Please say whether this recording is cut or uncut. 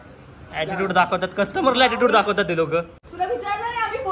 cut